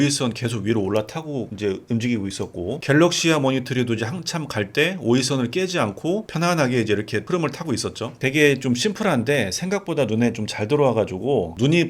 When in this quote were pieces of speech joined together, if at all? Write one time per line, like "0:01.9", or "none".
0:06.2
0:08.2